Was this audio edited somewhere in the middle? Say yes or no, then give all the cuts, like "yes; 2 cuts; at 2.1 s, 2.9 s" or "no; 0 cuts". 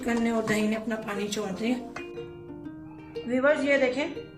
yes; 2 cuts; at 1.9 s, 3.2 s